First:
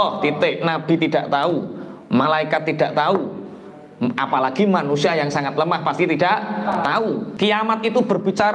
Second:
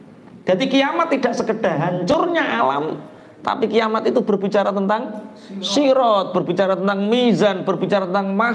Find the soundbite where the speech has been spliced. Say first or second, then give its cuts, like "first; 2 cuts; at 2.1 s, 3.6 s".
first; 1 cut; at 7.3 s